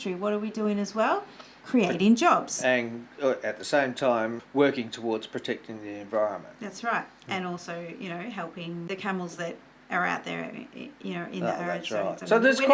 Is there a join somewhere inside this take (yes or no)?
yes